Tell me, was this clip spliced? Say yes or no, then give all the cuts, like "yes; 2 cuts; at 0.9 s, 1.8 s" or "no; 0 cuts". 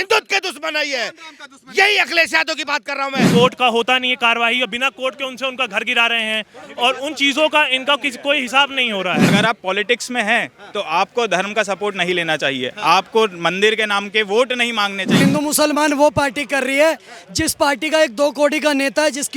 yes; 3 cuts; at 3.3 s, 9.3 s, 15.1 s